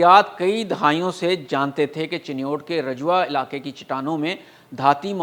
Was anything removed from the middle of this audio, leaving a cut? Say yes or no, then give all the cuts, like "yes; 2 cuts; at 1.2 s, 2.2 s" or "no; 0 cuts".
no; 0 cuts